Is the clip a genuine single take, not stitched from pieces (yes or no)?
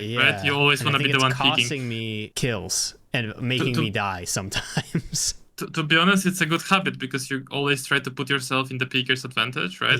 no